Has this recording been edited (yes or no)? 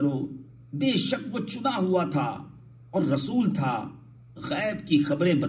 no